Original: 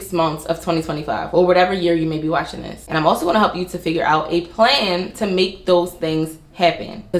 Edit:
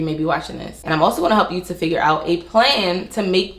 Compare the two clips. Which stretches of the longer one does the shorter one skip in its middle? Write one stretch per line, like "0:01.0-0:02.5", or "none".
none